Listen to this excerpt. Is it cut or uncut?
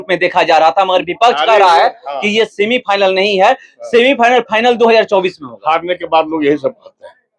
uncut